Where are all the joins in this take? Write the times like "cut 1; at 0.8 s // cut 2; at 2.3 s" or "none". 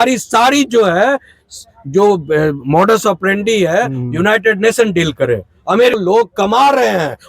cut 1; at 6.0 s